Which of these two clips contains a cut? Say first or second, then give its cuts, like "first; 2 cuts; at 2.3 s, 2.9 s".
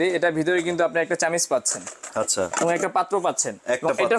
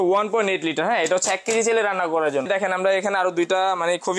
second; 1 cut; at 2.5 s